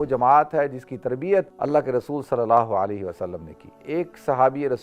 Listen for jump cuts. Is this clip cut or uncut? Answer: cut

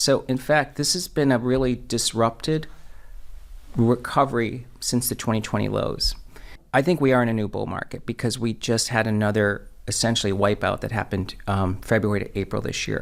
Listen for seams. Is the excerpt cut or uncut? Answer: uncut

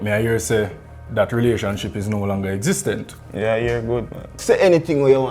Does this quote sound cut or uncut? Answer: cut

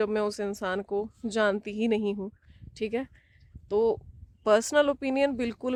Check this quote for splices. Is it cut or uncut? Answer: uncut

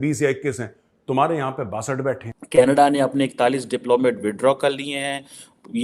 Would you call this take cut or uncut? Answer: cut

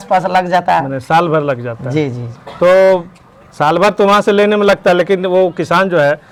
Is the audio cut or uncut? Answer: uncut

